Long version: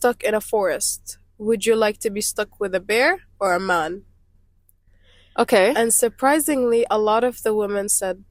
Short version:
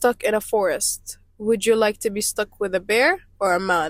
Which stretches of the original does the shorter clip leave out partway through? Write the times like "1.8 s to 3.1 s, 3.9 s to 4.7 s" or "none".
none